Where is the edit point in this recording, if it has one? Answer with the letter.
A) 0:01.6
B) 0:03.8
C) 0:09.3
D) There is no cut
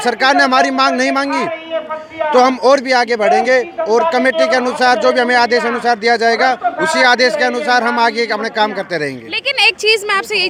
D